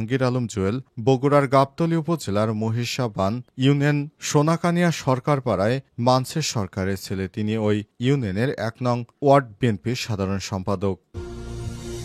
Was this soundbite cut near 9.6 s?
no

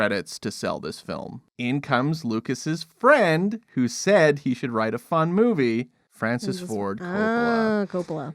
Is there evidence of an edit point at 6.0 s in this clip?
yes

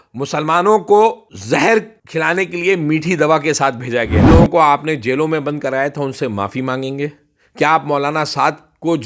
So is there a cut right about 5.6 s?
no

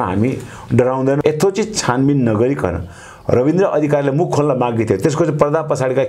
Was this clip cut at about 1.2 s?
yes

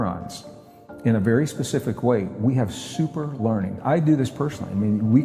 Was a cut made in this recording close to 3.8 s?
yes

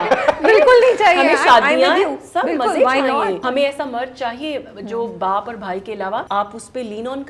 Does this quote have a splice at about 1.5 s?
no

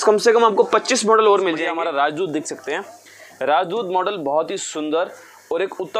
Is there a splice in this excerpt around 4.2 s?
no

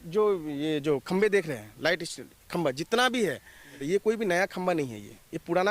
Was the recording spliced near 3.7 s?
yes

